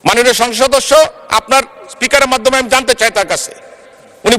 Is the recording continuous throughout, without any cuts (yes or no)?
yes